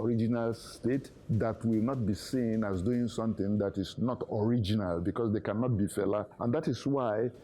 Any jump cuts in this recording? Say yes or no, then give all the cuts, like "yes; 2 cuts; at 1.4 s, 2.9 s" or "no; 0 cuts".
no; 0 cuts